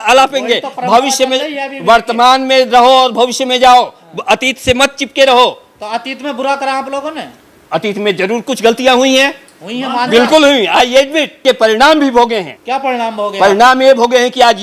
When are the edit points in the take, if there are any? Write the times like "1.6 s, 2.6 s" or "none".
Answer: 11.3 s, 12.5 s

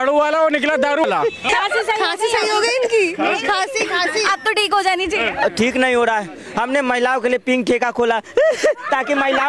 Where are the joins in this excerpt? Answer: 1.0 s

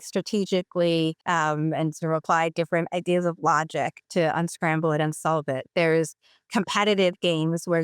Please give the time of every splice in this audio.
1.2 s, 4.0 s

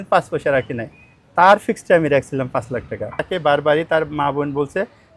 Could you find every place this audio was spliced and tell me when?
3.3 s

